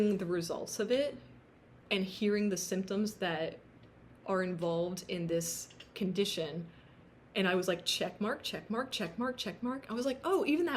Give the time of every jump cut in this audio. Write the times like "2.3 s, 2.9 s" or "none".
none